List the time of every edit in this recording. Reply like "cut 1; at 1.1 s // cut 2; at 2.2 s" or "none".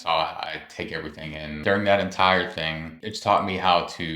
cut 1; at 1.6 s // cut 2; at 3.1 s